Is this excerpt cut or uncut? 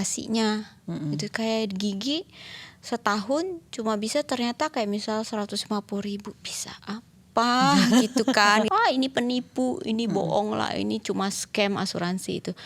cut